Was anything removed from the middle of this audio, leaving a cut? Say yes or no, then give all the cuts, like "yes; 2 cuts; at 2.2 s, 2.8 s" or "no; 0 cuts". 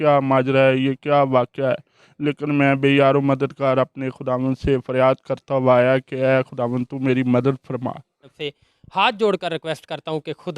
yes; 1 cut; at 8.4 s